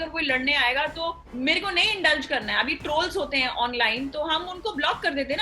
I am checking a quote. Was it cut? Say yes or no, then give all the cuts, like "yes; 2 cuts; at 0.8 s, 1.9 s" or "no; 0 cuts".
yes; 1 cut; at 1.2 s